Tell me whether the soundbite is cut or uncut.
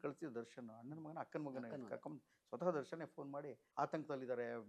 cut